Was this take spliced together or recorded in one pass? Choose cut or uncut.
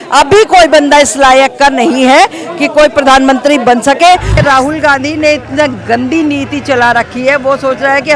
cut